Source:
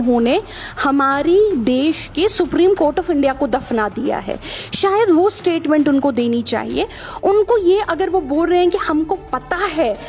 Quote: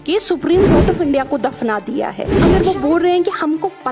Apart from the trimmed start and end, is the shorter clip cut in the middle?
yes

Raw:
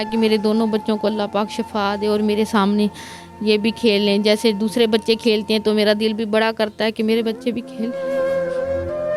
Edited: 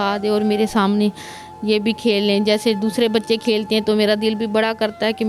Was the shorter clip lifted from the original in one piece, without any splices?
yes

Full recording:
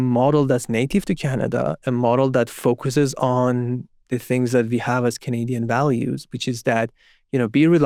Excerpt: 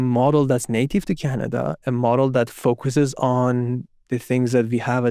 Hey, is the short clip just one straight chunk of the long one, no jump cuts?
yes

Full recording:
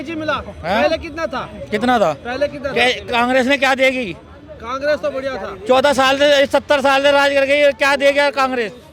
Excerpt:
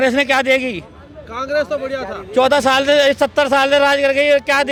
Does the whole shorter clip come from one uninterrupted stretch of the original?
yes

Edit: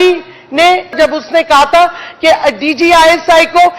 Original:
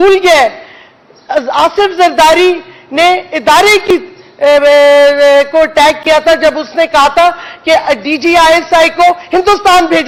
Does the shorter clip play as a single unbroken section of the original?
no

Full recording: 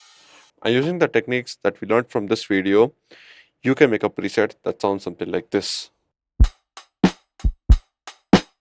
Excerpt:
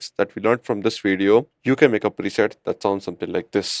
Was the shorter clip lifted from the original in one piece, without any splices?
no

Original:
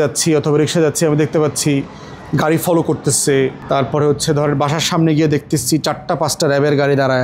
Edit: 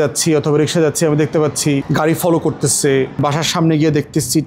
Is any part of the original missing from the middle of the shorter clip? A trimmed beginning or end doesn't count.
yes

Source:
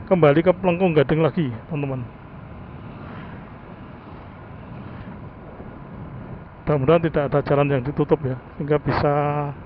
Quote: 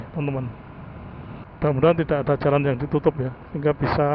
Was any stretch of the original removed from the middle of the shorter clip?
yes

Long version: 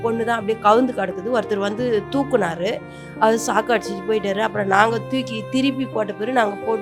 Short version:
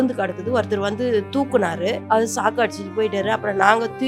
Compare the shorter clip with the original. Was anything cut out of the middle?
yes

